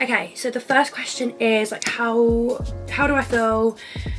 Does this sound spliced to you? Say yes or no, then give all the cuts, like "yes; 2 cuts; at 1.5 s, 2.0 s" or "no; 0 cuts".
no; 0 cuts